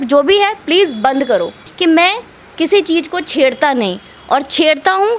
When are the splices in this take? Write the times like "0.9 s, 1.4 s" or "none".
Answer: 1.6 s